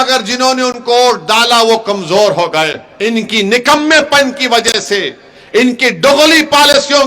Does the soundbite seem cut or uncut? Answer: cut